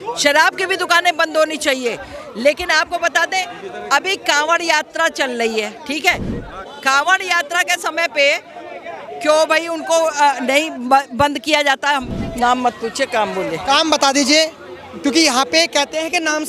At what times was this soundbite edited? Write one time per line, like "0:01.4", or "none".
0:12.1